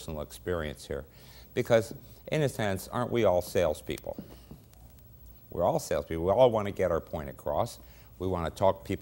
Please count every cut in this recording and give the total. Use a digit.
1